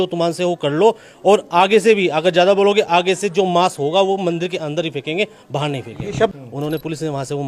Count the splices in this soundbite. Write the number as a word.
one